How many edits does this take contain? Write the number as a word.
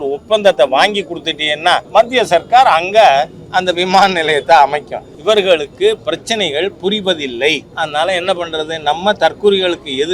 three